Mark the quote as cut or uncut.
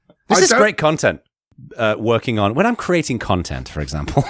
cut